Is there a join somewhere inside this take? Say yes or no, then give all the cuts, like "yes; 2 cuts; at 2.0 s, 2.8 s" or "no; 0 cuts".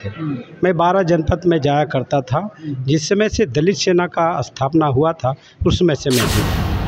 no; 0 cuts